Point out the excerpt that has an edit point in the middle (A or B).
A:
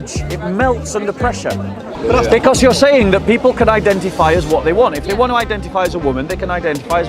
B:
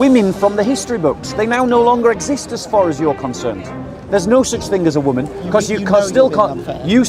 A